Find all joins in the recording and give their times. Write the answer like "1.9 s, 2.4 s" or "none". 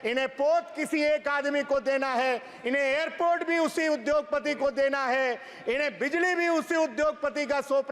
none